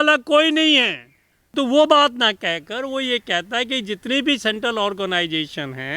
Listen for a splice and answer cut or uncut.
cut